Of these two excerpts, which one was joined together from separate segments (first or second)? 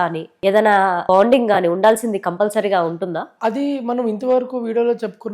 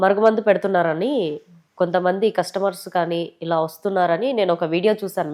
first